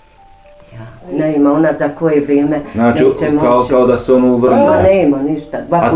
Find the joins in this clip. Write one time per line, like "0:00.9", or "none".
0:01.1